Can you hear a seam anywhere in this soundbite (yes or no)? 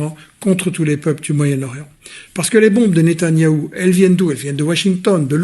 no